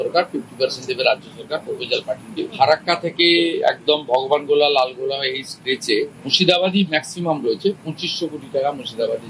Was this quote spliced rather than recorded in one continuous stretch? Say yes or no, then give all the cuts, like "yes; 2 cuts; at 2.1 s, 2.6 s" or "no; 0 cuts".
yes; 1 cut; at 2.3 s